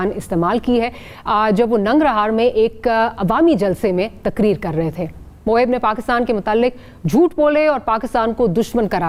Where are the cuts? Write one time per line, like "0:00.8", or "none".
none